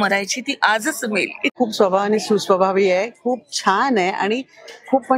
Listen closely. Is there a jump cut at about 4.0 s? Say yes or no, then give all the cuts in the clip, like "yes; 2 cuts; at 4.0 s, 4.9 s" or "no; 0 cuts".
no; 1 cut; at 1.5 s